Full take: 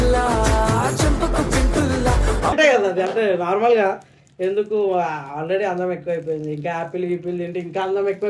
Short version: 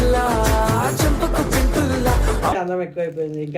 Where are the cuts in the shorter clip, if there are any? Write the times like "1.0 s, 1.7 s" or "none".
2.6 s